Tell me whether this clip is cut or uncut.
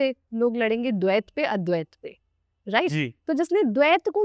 uncut